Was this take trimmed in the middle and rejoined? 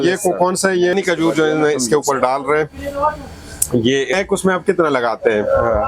yes; 2 cuts; at 0.9 s, 4.1 s

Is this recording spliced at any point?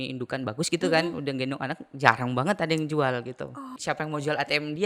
yes; 1 cut; at 3.7 s

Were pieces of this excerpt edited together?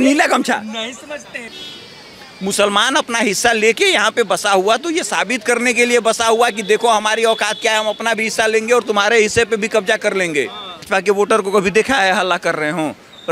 yes; 2 cuts; at 1.4 s, 10.8 s

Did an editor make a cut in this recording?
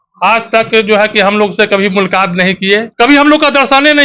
yes; 1 cut; at 2.9 s

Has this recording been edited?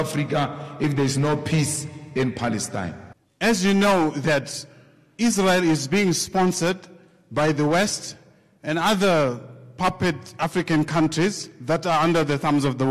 yes; 1 cut; at 3.0 s

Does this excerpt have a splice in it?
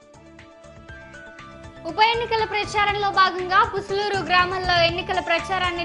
no; 0 cuts

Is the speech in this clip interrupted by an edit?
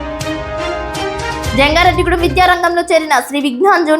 yes; 1 cut; at 1.1 s

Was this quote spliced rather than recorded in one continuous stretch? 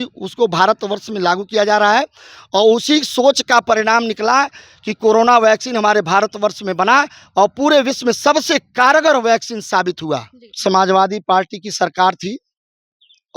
yes; 1 cut; at 10.5 s

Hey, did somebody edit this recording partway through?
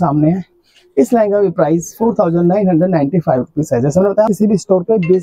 yes; 1 cut; at 4.3 s

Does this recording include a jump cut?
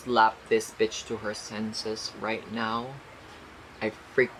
no; 0 cuts

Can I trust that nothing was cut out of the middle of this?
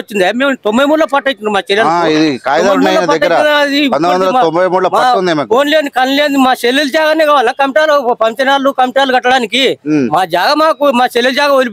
yes; 0 cuts

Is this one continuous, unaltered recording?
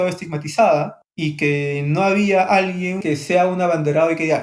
no; 2 cuts; at 1.0 s, 3.0 s

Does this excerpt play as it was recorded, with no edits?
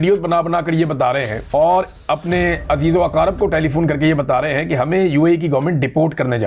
no; 1 cut; at 1.4 s

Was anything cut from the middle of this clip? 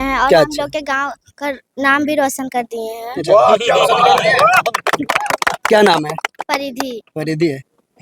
no; 0 cuts

